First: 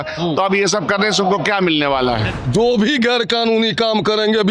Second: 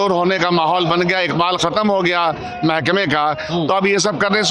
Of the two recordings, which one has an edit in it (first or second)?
first